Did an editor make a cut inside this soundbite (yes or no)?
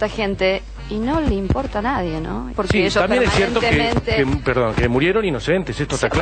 no